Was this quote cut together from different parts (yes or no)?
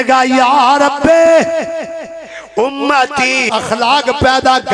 yes